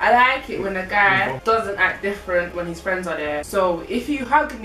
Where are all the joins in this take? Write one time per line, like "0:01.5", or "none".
0:01.4
0:03.5